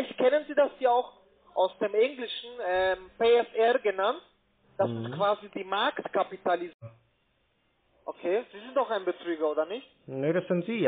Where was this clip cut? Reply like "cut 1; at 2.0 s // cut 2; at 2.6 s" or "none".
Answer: cut 1; at 6.8 s